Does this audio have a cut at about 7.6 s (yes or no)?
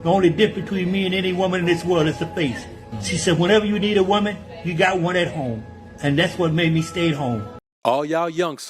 yes